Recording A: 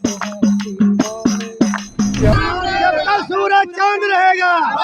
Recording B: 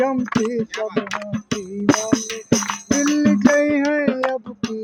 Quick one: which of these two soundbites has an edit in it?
A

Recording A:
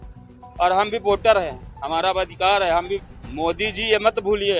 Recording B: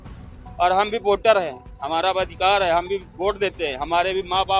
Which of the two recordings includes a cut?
A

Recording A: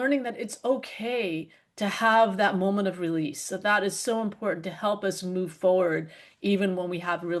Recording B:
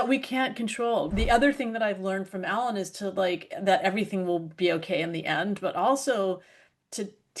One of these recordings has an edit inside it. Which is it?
B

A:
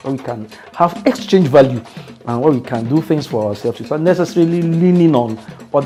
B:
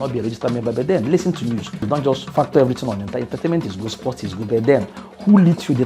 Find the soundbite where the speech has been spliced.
B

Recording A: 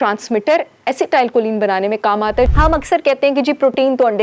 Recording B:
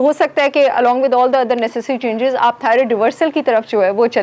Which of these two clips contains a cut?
A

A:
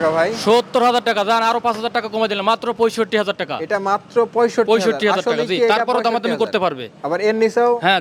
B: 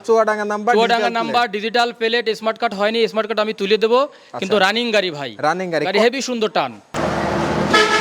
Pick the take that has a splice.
B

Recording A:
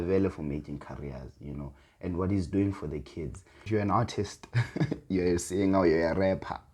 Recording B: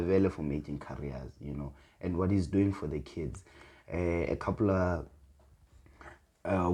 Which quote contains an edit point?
A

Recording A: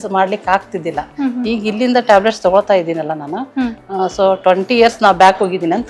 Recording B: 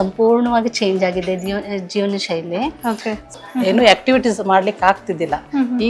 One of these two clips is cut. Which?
B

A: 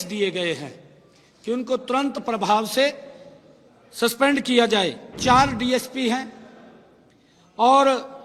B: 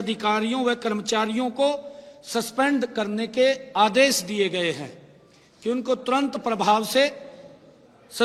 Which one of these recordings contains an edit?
A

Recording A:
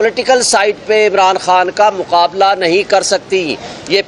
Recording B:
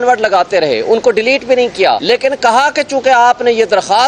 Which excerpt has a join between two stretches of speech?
B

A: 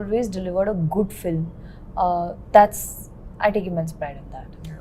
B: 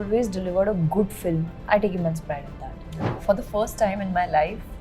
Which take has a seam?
B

